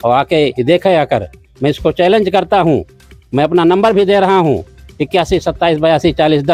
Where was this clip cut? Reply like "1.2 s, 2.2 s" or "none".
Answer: none